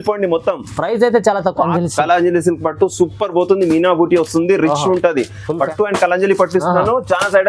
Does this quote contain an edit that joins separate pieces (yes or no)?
yes